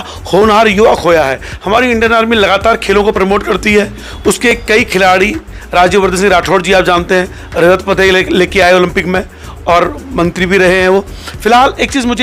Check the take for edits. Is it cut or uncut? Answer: uncut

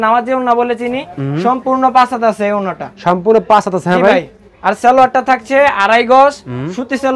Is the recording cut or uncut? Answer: uncut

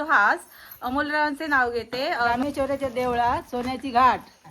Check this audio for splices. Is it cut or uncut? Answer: cut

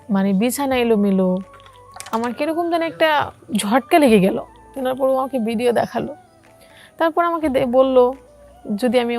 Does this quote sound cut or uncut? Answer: cut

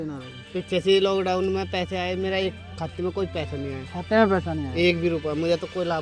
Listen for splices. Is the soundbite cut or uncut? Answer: uncut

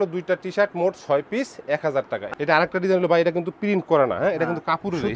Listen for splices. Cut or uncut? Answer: cut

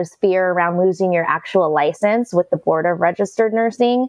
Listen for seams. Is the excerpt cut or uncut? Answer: uncut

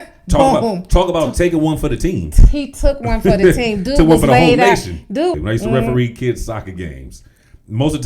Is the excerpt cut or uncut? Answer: cut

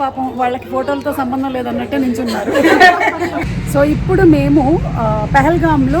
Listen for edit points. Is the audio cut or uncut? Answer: uncut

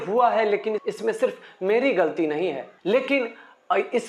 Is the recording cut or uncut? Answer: uncut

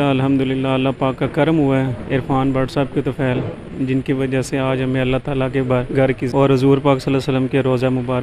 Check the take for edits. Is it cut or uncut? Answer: uncut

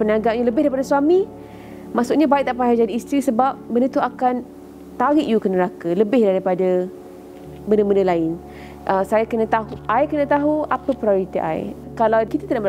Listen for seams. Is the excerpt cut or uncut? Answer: uncut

